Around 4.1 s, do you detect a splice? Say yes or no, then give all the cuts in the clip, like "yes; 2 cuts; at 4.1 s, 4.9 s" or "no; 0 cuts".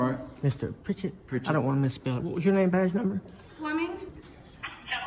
yes; 1 cut; at 4.1 s